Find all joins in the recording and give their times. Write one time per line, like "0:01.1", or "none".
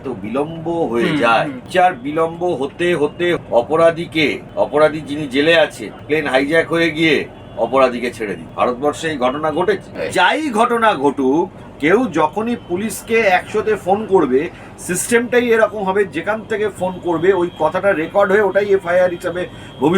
0:01.6
0:03.4
0:04.4
0:05.9
0:08.4
0:09.9